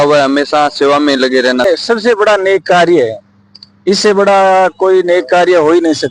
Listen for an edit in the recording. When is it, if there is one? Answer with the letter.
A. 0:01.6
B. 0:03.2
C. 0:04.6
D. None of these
A